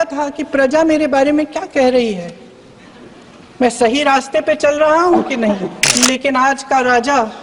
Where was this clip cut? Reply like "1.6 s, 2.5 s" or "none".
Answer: 5.8 s